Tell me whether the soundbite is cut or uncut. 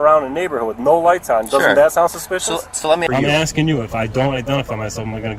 cut